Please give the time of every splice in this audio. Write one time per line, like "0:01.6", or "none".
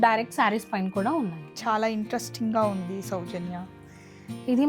0:01.5